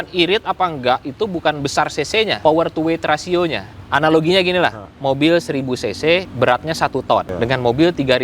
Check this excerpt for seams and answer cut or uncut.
cut